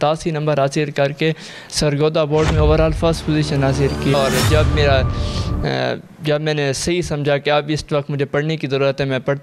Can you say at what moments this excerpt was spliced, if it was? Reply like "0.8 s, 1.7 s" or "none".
4.1 s